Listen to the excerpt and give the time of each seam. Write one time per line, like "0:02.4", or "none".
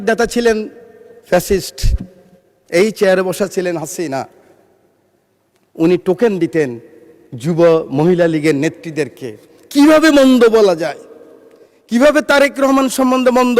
none